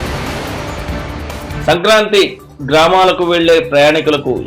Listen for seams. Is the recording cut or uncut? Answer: cut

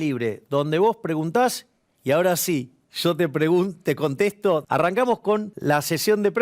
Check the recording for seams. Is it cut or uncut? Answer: cut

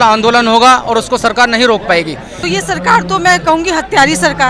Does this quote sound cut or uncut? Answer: cut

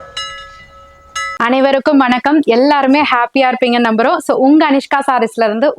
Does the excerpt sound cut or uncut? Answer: uncut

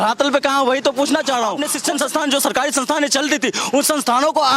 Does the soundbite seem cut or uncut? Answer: cut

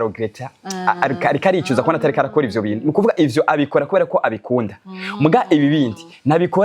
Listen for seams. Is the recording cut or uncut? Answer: uncut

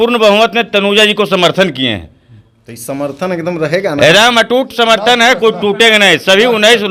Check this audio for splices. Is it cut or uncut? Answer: uncut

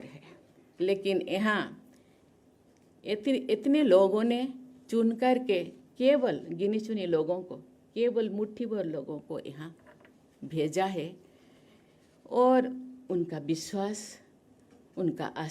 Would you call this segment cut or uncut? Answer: uncut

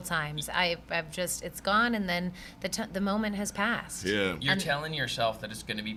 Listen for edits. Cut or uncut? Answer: uncut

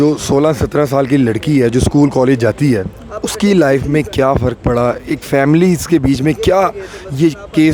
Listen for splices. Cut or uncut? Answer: uncut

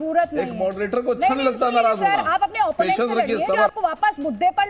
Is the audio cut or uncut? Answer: cut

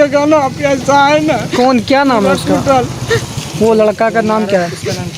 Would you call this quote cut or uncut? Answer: uncut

